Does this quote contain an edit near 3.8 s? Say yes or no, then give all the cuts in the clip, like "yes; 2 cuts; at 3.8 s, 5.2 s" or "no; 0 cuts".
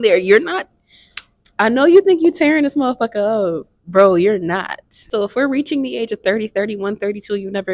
no; 1 cut; at 5.1 s